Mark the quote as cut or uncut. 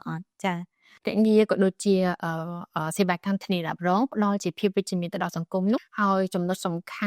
cut